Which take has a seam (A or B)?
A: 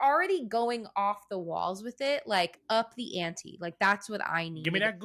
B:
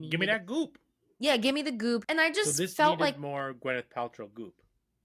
B